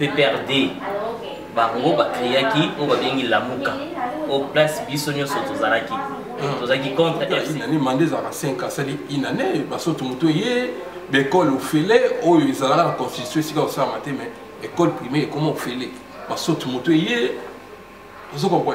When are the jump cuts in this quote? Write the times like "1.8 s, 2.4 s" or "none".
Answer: 7.4 s